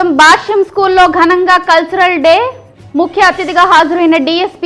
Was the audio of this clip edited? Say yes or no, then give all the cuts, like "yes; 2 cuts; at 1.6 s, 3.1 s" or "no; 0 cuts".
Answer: no; 0 cuts